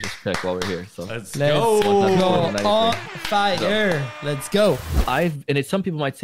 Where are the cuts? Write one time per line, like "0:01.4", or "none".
0:04.9